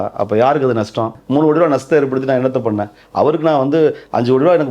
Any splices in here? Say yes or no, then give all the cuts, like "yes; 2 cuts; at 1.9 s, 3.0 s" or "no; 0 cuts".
yes; 1 cut; at 1.2 s